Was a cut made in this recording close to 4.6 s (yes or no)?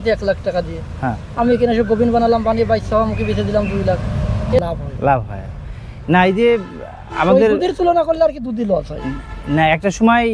no